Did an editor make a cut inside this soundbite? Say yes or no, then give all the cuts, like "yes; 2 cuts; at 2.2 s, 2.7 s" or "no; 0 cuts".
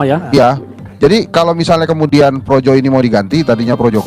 no; 0 cuts